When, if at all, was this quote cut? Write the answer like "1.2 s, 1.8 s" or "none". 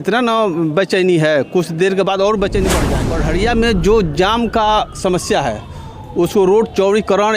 2.9 s